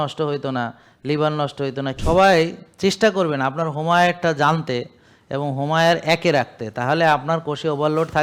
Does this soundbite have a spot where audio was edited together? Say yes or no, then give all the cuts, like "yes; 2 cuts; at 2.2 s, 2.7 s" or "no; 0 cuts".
yes; 1 cut; at 2.0 s